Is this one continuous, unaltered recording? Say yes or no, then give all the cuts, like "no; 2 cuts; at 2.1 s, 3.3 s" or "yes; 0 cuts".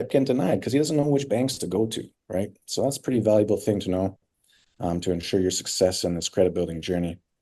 yes; 0 cuts